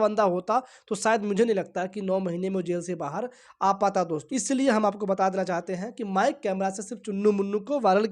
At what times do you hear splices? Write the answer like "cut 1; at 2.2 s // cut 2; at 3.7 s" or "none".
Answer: cut 1; at 4.2 s